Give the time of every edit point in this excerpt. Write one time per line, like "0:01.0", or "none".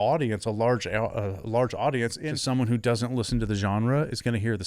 0:02.3